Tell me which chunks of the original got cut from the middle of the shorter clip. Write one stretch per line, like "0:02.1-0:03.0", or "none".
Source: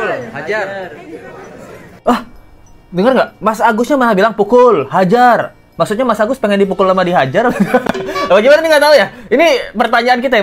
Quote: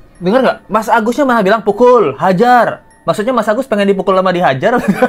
none